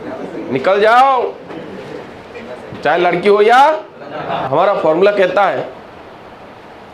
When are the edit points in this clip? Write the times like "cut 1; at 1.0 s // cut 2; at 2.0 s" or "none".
cut 1; at 4.4 s